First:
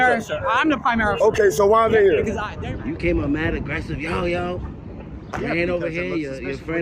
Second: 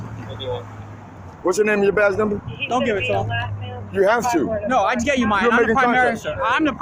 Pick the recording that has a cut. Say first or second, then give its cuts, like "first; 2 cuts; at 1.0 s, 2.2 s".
first; 1 cut; at 2.5 s